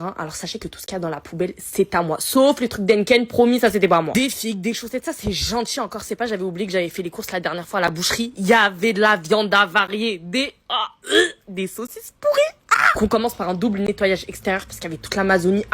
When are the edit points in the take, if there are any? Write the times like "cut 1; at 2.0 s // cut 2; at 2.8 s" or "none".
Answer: cut 1; at 4.4 s // cut 2; at 10.8 s